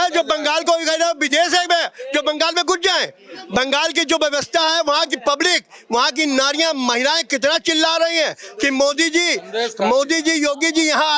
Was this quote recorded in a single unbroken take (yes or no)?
yes